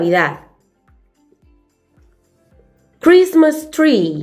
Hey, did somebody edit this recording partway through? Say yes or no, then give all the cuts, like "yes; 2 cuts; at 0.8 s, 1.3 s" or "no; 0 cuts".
no; 0 cuts